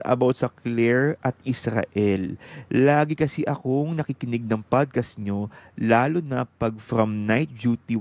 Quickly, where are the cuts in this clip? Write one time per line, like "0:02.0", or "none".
none